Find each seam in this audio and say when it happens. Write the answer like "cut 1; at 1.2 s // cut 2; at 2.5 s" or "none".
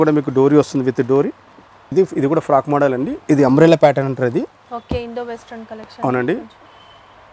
cut 1; at 1.9 s